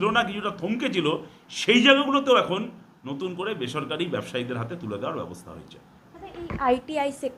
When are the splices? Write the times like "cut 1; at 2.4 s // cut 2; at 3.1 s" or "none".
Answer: none

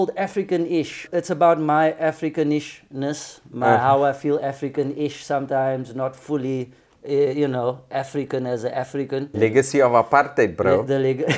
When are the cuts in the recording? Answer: cut 1; at 1.0 s // cut 2; at 9.3 s

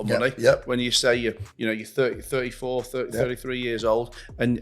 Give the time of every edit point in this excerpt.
none

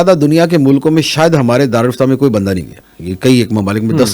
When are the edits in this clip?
cut 1; at 2.8 s

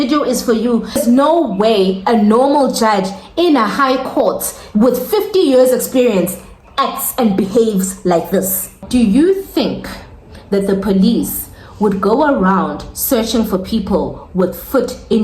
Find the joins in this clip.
cut 1; at 1.0 s // cut 2; at 8.8 s

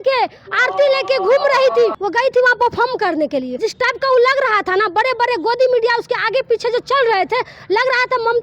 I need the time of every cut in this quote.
cut 1; at 2.0 s // cut 2; at 3.5 s

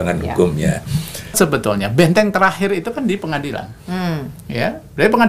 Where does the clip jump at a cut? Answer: cut 1; at 1.4 s

